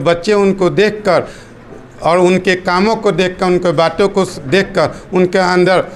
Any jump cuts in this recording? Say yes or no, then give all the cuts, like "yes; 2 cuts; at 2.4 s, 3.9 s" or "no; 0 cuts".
no; 0 cuts